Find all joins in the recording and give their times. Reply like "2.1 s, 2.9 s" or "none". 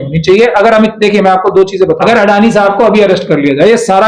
2.0 s